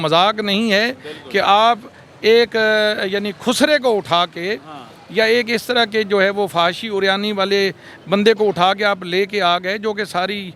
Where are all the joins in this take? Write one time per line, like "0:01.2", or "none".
none